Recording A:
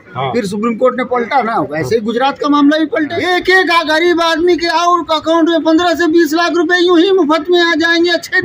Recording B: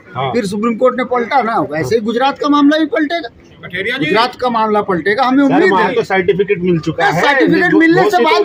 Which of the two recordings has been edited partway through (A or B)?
A